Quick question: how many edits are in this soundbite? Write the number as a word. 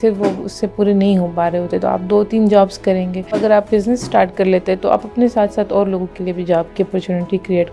one